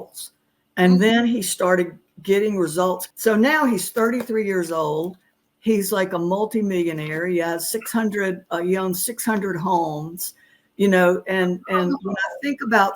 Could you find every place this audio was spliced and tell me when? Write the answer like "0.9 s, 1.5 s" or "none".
3.0 s